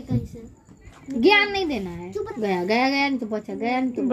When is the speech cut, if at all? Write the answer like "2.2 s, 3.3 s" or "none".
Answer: 2.3 s